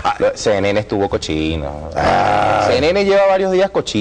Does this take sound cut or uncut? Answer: uncut